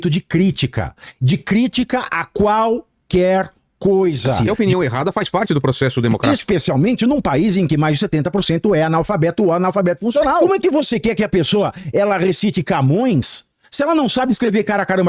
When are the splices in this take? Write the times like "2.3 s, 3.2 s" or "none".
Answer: 4.4 s, 6.2 s, 10.4 s